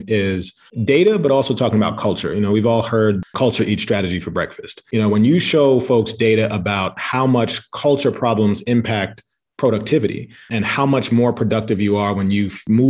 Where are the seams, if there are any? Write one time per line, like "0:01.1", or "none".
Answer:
0:03.2
0:04.8
0:10.5